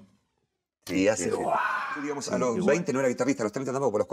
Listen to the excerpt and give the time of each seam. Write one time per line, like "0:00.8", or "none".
0:02.2